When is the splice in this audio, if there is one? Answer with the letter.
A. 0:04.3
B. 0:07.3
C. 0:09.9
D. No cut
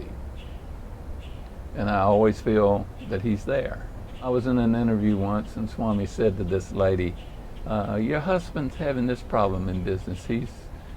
A